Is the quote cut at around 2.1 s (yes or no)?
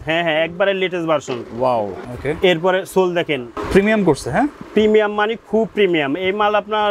yes